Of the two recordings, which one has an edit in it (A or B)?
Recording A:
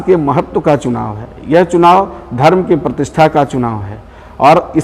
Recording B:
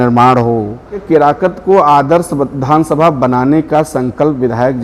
B